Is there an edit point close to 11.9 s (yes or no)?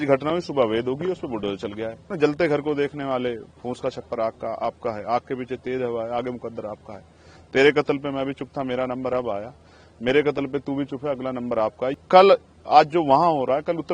yes